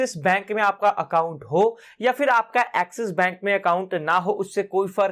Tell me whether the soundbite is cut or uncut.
uncut